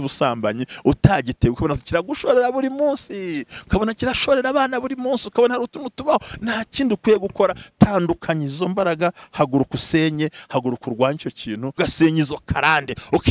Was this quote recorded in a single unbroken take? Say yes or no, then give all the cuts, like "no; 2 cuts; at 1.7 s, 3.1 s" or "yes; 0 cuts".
no; 1 cut; at 11.7 s